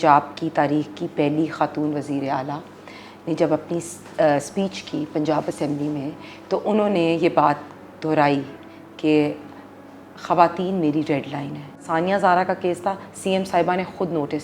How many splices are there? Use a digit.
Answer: 1